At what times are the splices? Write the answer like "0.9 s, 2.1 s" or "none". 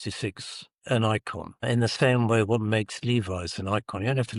none